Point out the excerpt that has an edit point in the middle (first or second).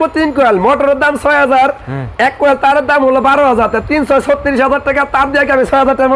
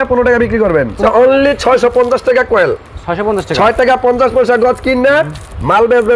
second